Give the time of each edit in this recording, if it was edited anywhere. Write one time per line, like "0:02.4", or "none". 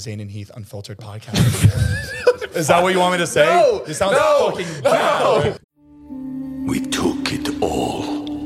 0:05.6